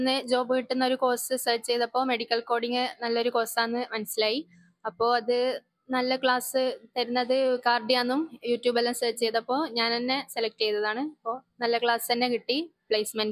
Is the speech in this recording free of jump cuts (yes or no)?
yes